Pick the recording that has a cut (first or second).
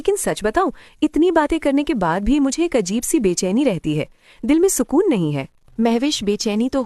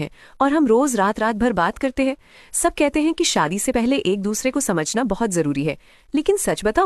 first